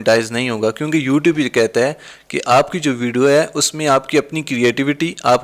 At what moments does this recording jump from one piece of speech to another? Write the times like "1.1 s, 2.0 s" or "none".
none